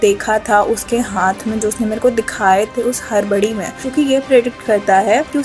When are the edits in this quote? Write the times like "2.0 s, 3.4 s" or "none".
none